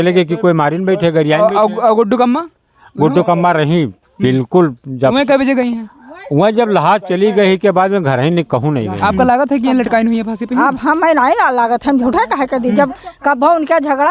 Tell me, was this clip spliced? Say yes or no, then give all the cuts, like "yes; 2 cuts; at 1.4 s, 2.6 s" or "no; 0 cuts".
yes; 1 cut; at 9.0 s